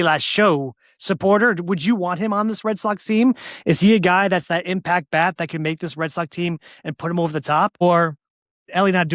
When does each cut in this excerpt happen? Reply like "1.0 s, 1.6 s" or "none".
8.0 s